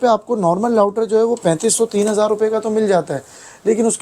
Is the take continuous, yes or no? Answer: yes